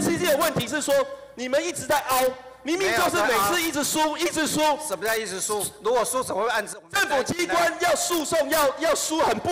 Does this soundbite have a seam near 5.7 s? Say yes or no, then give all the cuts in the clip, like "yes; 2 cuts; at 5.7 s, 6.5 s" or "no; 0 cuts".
no; 0 cuts